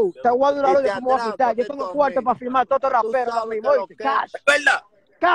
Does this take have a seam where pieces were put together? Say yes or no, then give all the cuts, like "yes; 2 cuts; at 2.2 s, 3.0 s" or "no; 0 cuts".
no; 0 cuts